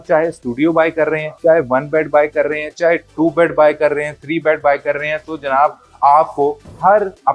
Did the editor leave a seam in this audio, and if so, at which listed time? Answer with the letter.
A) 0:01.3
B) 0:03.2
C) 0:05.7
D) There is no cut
A